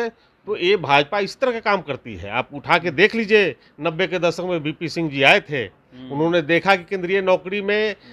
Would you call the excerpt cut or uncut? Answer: uncut